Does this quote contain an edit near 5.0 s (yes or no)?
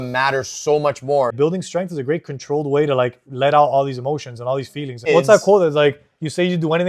yes